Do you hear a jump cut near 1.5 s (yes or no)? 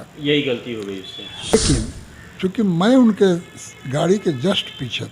yes